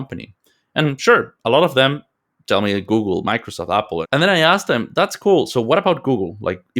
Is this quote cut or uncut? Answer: cut